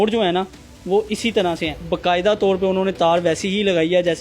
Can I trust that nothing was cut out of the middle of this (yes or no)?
no